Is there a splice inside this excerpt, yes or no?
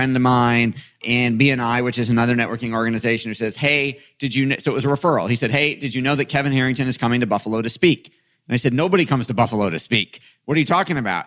no